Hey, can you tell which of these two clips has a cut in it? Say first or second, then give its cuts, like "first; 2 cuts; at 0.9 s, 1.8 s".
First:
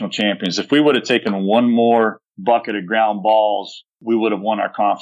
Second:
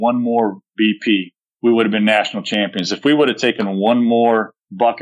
first; 1 cut; at 4.0 s